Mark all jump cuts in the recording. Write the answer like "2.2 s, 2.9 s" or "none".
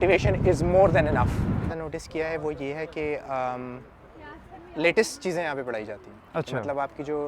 1.6 s